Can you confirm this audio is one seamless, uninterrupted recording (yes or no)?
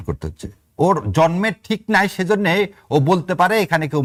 yes